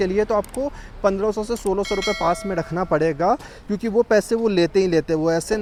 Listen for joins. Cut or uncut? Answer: uncut